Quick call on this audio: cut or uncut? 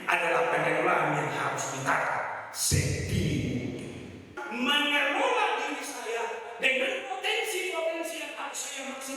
cut